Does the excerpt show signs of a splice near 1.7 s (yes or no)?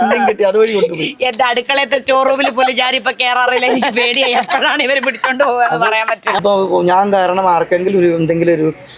no